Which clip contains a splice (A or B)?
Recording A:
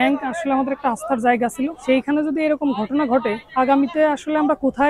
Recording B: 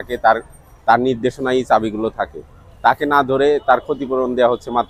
A